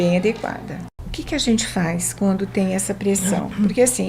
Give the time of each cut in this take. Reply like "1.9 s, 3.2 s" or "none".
1.0 s